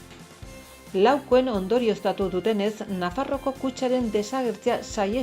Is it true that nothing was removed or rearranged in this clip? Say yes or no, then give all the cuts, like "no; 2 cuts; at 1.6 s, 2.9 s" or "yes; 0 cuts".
no; 1 cut; at 0.9 s